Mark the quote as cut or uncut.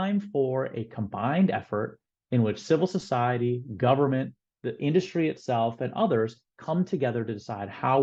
uncut